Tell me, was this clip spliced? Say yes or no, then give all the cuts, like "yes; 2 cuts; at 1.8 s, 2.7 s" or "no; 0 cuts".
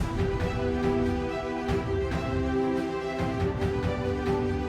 no; 0 cuts